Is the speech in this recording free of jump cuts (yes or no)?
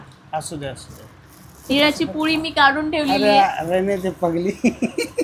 yes